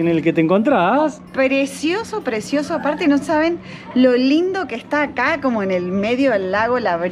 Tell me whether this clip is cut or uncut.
uncut